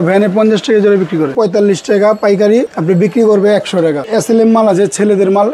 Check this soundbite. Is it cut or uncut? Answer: cut